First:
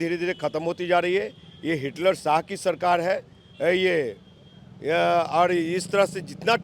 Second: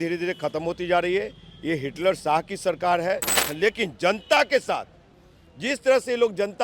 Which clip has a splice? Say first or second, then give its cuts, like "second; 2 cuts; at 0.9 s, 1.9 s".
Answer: second; 1 cut; at 3.4 s